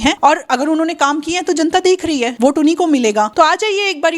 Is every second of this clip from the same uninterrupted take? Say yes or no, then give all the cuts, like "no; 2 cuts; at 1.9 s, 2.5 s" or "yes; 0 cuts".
yes; 0 cuts